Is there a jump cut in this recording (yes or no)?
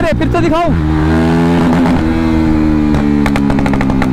no